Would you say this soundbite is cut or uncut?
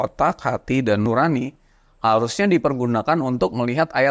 cut